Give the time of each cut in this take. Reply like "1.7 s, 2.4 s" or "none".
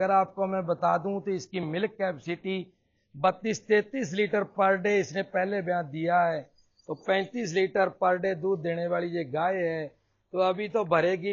none